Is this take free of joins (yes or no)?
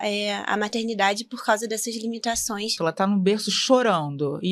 no